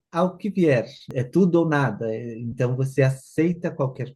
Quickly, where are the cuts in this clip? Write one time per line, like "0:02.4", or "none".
0:01.0